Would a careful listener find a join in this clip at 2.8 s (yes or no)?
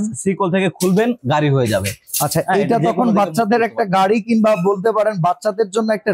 no